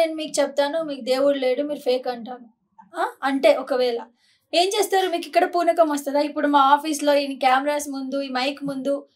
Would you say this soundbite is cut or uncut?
uncut